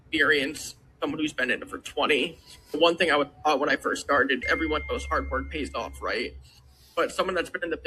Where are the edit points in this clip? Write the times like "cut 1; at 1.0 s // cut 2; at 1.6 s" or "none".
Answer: cut 1; at 4.4 s